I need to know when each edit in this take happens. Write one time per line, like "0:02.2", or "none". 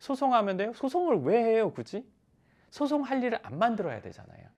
none